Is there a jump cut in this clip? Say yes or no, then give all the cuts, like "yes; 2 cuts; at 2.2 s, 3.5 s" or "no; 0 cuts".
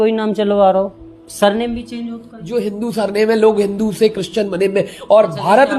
yes; 1 cut; at 2.3 s